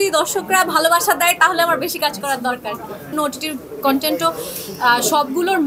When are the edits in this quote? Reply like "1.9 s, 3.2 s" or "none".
3.1 s